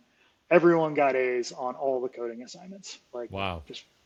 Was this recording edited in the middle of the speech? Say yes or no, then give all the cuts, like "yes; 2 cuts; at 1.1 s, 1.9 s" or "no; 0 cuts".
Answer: no; 0 cuts